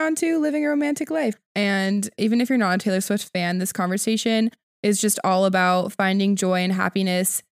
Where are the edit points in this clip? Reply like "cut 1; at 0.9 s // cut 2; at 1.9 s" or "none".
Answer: cut 1; at 1.4 s